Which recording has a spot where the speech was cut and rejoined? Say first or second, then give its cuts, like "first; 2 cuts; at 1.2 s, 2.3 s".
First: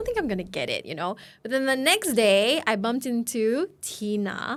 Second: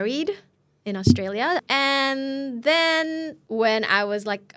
second; 2 cuts; at 1.6 s, 3.4 s